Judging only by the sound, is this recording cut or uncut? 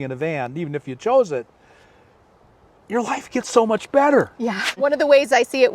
cut